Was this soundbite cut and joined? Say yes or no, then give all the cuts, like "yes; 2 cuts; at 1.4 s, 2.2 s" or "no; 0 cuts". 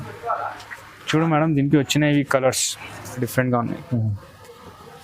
yes; 1 cut; at 3.3 s